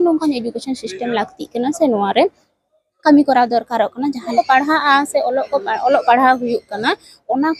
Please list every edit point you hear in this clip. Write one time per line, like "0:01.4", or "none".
0:04.2